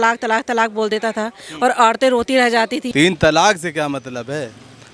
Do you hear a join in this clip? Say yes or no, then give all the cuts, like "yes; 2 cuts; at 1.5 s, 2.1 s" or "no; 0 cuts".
yes; 1 cut; at 2.8 s